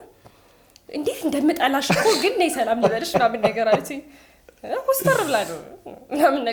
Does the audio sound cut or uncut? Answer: uncut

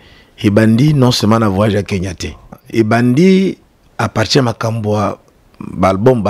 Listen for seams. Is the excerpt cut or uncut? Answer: cut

